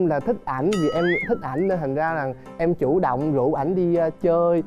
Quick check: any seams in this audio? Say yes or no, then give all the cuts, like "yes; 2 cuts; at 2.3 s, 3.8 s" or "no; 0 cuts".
no; 0 cuts